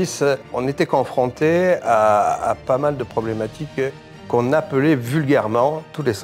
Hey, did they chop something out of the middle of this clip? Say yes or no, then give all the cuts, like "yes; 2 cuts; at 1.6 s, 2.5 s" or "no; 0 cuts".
no; 0 cuts